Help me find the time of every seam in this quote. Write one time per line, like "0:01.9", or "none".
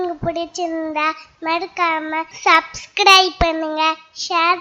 0:02.3